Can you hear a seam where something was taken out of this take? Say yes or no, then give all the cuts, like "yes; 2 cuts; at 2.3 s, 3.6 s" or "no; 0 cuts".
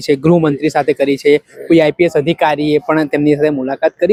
no; 0 cuts